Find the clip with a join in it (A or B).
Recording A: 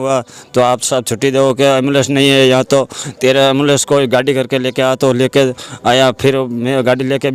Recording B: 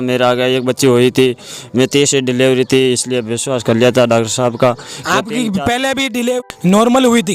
B